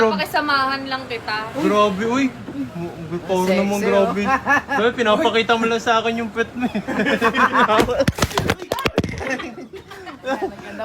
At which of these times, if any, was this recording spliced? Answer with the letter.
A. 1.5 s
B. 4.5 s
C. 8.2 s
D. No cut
D